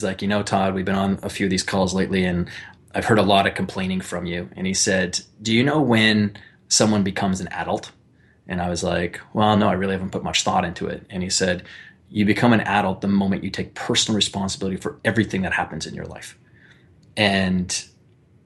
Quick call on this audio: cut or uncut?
uncut